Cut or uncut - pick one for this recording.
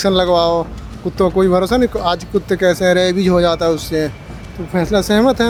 uncut